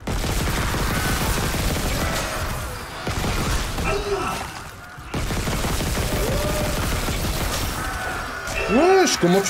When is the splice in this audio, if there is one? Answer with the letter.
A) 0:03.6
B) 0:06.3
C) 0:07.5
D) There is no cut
D